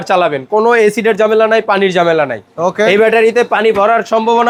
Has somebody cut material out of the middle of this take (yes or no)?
no